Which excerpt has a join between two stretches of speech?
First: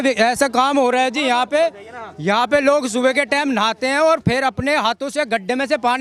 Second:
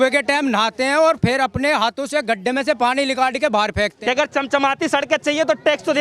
second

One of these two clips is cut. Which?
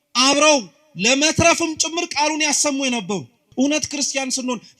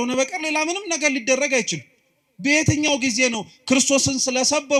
first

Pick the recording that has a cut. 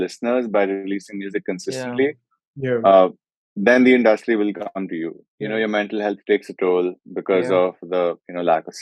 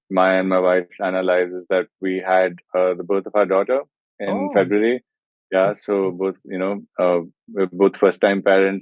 first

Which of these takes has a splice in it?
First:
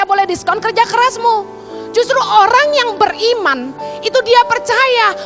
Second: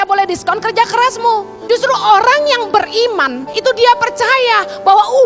second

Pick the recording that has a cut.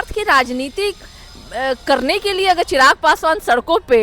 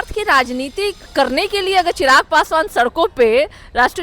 second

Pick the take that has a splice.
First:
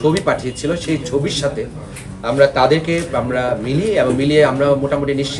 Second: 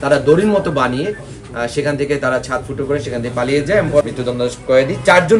second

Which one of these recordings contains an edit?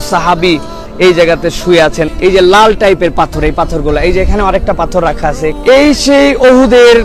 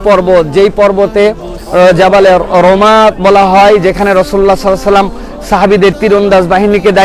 first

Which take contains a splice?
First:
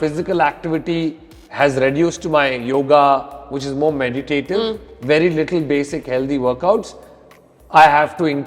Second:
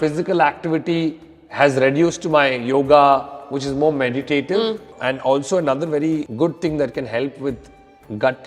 second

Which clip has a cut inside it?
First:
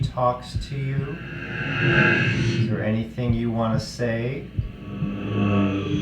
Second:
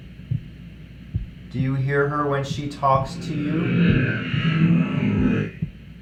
first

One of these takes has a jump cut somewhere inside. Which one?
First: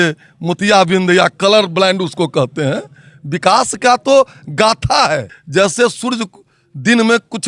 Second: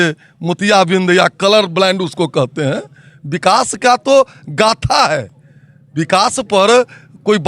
first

